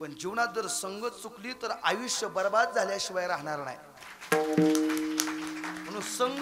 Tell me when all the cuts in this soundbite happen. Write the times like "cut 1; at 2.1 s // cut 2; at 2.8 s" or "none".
none